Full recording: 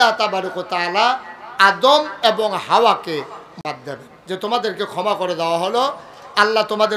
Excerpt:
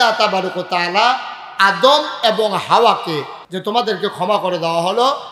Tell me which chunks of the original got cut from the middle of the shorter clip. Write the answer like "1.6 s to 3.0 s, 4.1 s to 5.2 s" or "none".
3.4 s to 4.2 s